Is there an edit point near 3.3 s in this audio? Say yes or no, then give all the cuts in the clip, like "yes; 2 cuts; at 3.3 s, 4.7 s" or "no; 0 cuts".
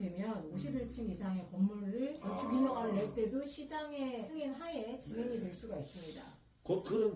no; 0 cuts